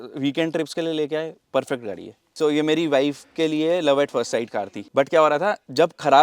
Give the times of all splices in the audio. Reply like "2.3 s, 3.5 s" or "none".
2.4 s, 4.8 s